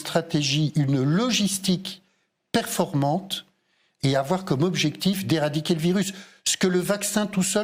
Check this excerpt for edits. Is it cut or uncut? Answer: uncut